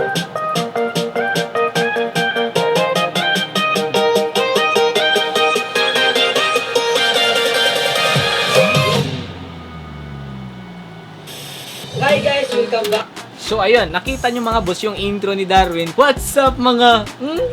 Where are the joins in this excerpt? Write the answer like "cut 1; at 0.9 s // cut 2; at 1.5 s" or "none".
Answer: cut 1; at 13.9 s // cut 2; at 15.9 s